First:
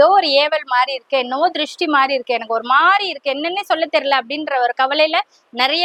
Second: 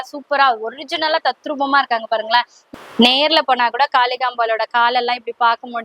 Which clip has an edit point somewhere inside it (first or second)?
second